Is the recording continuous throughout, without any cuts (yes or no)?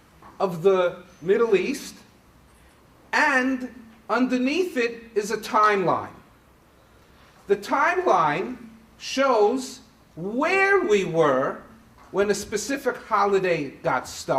no